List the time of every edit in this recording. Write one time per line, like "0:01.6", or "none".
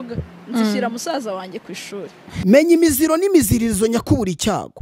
0:02.3